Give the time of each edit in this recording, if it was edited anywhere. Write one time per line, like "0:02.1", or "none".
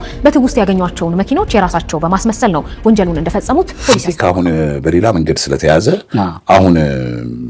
0:04.1